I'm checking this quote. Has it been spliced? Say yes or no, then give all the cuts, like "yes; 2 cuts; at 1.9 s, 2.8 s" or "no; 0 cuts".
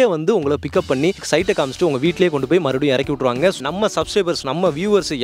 yes; 2 cuts; at 1.2 s, 3.6 s